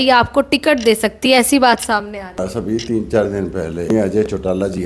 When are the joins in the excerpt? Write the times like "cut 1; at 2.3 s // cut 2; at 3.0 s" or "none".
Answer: cut 1; at 2.4 s // cut 2; at 3.9 s